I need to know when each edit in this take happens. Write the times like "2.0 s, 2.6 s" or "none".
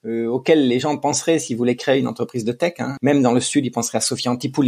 2.9 s